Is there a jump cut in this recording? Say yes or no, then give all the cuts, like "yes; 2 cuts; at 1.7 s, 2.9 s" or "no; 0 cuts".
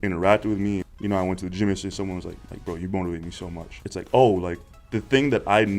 yes; 3 cuts; at 0.8 s, 2.3 s, 3.7 s